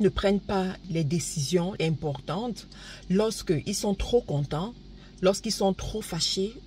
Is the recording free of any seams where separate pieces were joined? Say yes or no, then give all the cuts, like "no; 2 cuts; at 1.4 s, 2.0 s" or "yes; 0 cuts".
no; 2 cuts; at 0.8 s, 1.7 s